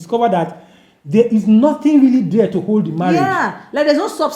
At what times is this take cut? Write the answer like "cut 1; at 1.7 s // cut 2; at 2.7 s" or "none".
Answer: none